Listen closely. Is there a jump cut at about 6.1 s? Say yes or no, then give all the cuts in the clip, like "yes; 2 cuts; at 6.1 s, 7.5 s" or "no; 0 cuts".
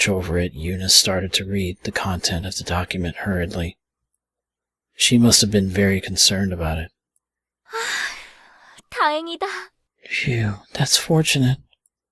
yes; 1 cut; at 6.1 s